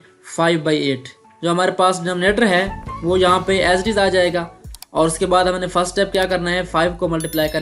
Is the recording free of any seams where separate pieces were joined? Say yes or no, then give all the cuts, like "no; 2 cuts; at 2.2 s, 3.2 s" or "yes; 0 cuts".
no; 1 cut; at 1.3 s